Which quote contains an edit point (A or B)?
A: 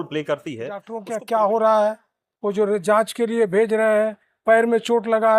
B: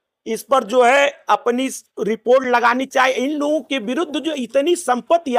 A